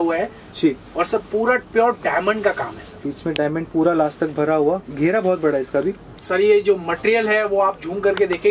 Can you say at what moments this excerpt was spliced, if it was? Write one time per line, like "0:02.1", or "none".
0:06.2